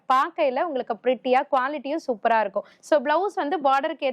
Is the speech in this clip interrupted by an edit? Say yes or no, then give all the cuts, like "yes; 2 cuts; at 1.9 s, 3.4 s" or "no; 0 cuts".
yes; 1 cut; at 2.7 s